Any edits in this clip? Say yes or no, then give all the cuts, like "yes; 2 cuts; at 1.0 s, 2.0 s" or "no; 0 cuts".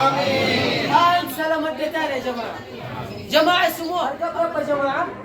yes; 1 cut; at 4.2 s